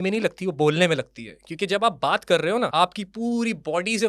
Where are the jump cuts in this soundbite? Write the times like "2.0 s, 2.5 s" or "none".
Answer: 2.7 s